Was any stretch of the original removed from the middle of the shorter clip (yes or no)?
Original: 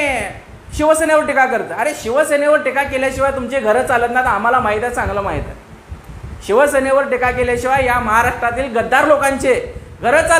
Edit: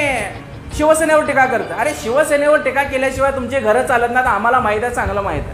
no